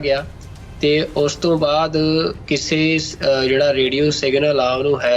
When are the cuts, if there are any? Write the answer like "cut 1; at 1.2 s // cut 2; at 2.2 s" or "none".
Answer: none